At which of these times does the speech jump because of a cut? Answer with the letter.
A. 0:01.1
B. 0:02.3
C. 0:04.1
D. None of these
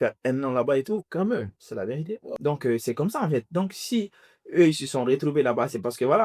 B